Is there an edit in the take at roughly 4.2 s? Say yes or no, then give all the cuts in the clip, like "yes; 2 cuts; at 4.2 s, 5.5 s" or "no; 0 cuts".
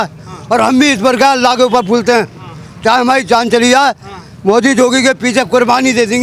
no; 0 cuts